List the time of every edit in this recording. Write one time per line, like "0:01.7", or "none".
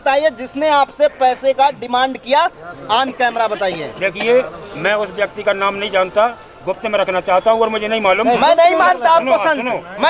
none